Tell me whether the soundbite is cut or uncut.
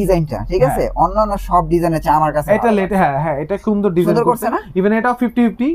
uncut